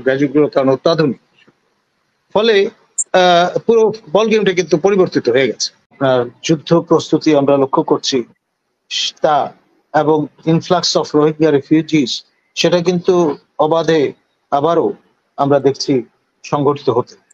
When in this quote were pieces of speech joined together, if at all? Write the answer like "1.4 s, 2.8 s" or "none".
5.9 s